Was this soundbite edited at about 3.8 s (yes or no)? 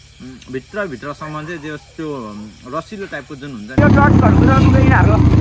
yes